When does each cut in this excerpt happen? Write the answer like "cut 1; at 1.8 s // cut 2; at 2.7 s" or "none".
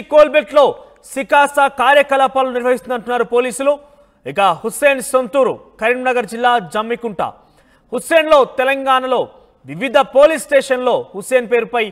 none